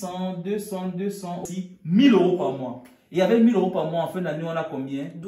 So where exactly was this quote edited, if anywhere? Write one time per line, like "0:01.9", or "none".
0:01.5